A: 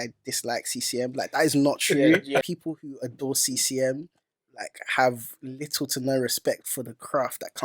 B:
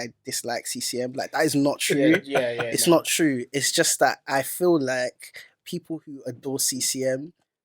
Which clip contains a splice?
A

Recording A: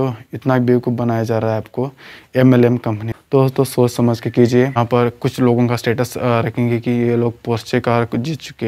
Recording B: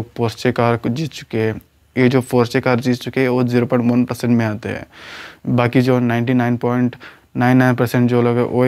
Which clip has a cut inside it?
A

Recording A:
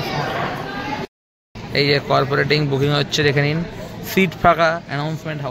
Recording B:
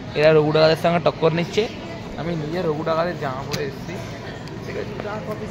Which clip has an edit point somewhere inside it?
A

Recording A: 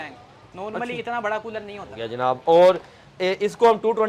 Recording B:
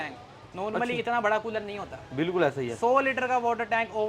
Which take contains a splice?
A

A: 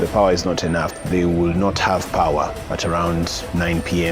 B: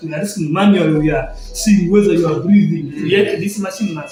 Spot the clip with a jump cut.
A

